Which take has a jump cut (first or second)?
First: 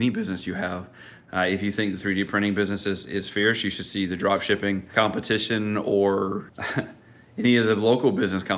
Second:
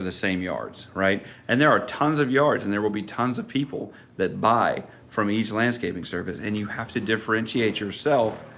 first